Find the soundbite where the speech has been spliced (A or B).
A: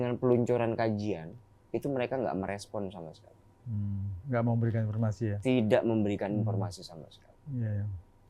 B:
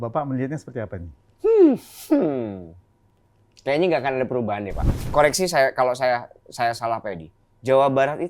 B